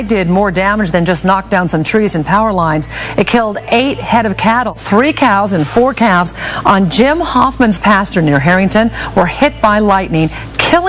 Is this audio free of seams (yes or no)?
yes